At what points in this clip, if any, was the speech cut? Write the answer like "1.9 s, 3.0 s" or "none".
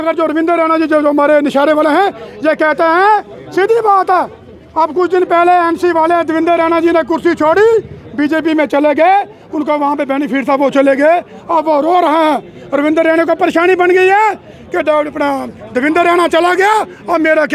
none